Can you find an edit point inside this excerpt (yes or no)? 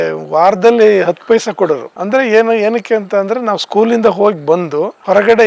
yes